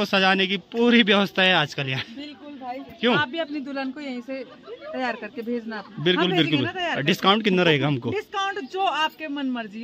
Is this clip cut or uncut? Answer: uncut